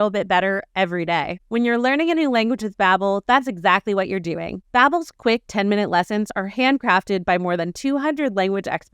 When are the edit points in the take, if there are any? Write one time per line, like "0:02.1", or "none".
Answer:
0:01.3